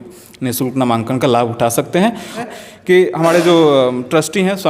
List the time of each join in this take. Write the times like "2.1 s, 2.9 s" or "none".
2.4 s